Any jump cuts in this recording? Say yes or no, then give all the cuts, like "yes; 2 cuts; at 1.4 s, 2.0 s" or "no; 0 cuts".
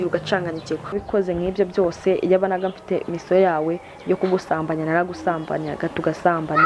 yes; 1 cut; at 1.0 s